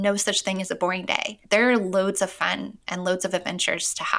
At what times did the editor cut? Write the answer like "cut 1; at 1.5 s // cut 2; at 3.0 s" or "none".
cut 1; at 1.3 s

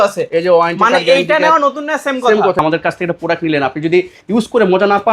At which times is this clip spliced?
cut 1; at 2.6 s

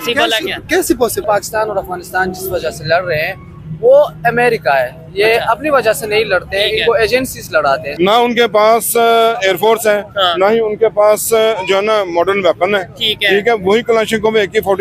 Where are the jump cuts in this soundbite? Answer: cut 1; at 1.2 s // cut 2; at 7.9 s

